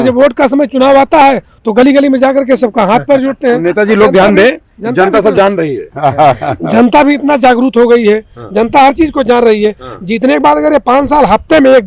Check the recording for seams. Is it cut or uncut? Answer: uncut